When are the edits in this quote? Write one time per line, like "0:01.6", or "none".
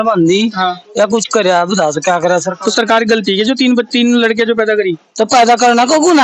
none